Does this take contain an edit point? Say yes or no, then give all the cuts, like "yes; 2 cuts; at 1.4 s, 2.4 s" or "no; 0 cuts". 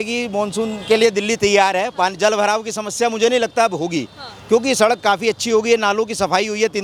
no; 0 cuts